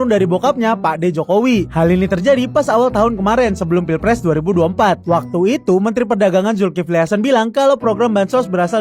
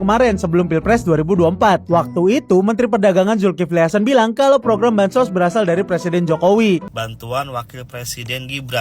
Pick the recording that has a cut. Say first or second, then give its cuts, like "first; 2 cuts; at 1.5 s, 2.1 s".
second; 1 cut; at 6.9 s